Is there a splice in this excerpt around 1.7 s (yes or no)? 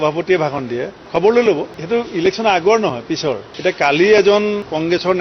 yes